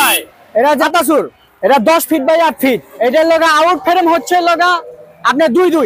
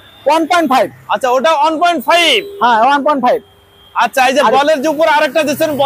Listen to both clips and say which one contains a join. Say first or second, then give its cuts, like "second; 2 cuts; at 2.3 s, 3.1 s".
first; 2 cuts; at 0.9 s, 2.9 s